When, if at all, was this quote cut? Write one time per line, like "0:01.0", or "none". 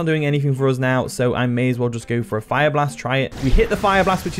0:03.3